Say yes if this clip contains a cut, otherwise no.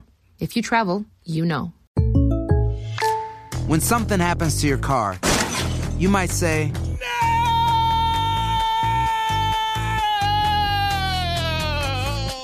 yes